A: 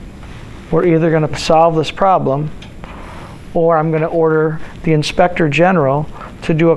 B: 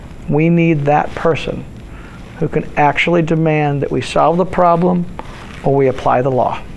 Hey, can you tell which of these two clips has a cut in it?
A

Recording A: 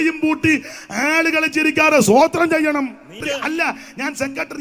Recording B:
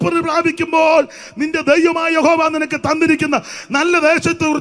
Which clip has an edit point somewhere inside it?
A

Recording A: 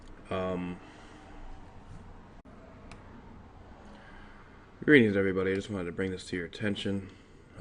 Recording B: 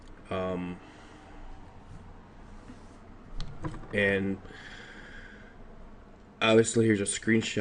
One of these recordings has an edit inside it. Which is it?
B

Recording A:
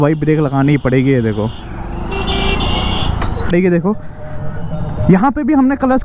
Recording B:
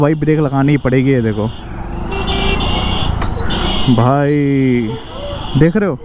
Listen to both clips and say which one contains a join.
A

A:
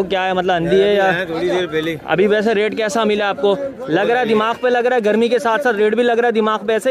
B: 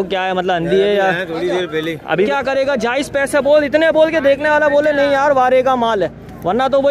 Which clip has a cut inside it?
B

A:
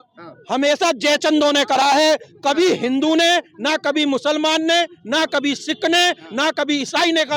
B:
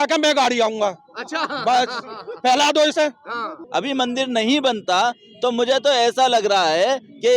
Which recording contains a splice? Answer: B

